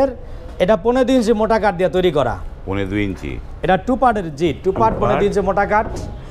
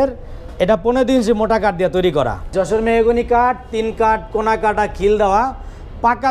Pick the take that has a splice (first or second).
second